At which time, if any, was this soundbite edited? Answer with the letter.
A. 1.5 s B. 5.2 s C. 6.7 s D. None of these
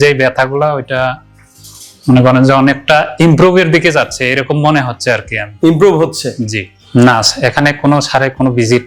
C